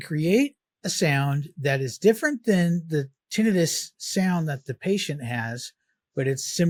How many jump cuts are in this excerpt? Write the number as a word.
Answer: zero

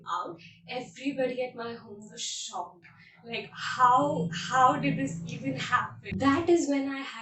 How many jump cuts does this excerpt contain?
one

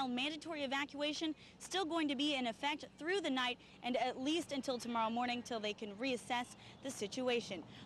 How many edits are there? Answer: zero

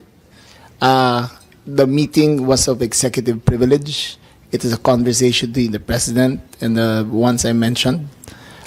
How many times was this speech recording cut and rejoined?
zero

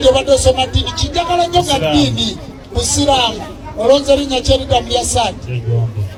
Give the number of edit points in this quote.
zero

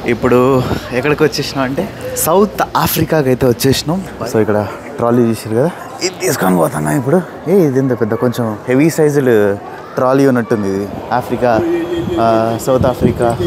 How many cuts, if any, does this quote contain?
five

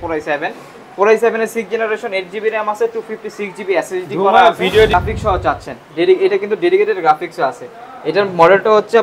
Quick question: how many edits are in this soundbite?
one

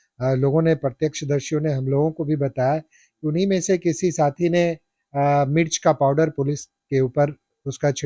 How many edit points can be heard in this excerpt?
zero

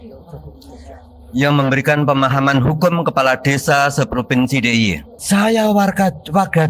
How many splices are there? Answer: one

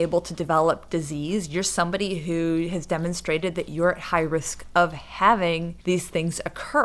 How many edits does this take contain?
one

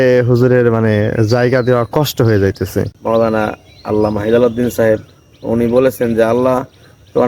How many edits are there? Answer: one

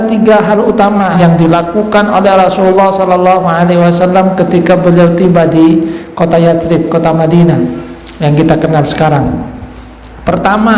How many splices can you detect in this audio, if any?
one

